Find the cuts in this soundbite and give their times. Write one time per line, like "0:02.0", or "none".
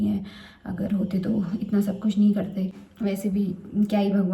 0:02.8